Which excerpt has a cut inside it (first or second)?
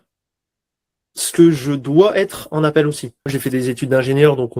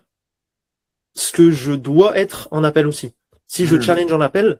first